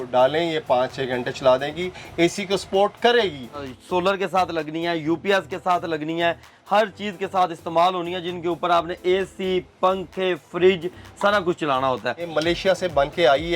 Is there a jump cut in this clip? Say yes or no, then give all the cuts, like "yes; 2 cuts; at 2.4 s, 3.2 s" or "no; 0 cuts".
yes; 2 cuts; at 3.7 s, 12.3 s